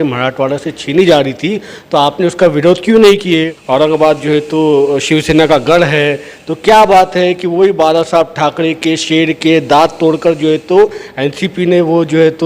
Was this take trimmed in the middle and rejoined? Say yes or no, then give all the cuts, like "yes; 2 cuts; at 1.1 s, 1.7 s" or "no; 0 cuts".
yes; 1 cut; at 3.6 s